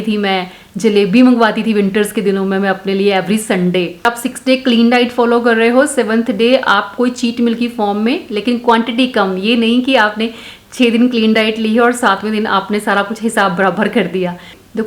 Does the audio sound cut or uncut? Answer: uncut